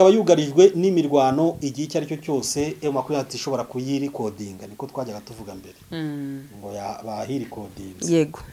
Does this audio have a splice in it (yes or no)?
no